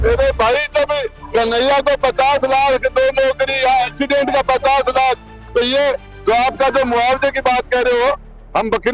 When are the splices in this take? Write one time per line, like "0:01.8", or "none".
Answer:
none